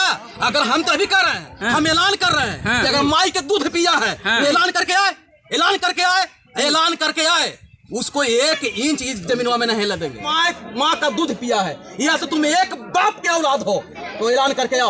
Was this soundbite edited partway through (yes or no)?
yes